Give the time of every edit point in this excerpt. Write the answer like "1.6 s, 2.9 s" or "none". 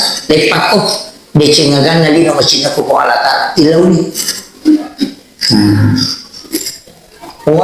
none

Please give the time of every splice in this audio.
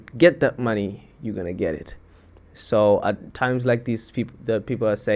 none

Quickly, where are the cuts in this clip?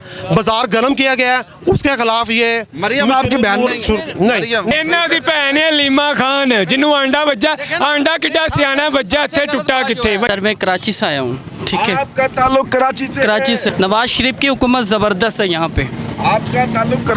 4.7 s, 10.3 s, 13.7 s

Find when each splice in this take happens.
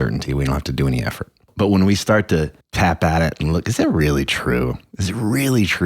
1.5 s, 2.6 s

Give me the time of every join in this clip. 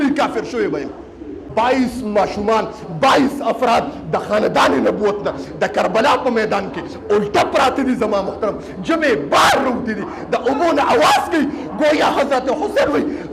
1.4 s

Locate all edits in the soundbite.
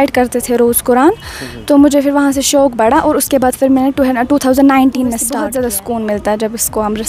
5.3 s

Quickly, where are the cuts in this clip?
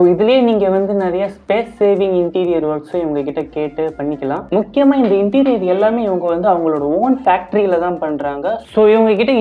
4.4 s, 8.6 s

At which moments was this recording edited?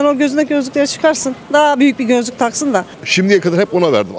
2.9 s

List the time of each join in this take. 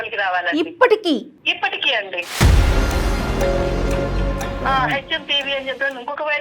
1.4 s, 4.6 s

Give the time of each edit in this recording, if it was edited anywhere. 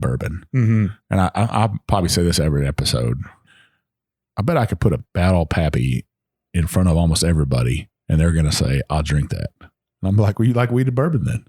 3.4 s, 5.0 s

